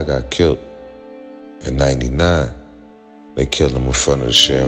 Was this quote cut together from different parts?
no; 0 cuts

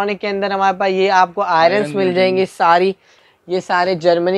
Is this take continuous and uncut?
no; 1 cut; at 3.2 s

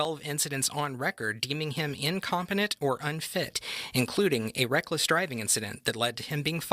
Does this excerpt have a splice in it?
no; 0 cuts

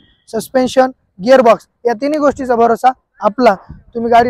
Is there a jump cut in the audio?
no; 0 cuts

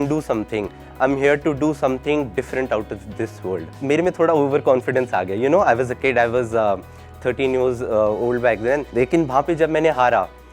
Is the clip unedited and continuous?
no; 2 cuts; at 3.7 s, 8.9 s

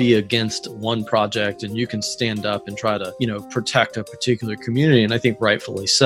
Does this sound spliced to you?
yes; 1 cut; at 3.1 s

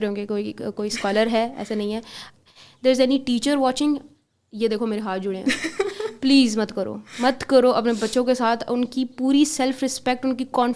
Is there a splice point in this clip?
yes; 1 cut; at 2.3 s

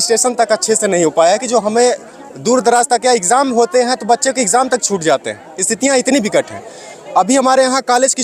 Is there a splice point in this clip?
no; 0 cuts

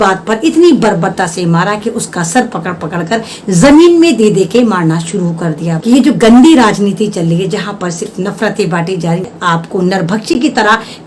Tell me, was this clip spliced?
yes; 2 cuts; at 5.8 s, 9.3 s

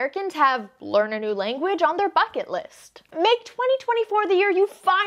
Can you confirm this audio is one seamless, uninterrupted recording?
no; 1 cut; at 3.1 s

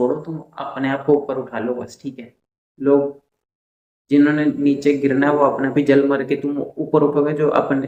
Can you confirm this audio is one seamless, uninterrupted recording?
yes; 0 cuts

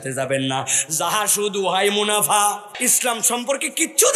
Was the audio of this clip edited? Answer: yes; 1 cut; at 2.7 s

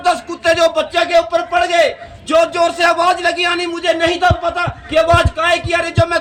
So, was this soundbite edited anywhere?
no; 0 cuts

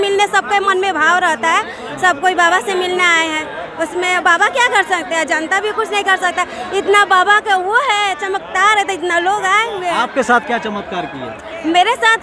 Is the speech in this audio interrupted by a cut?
no; 0 cuts

